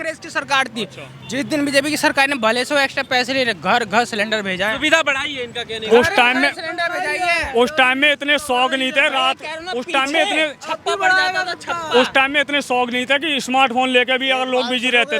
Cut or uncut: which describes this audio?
uncut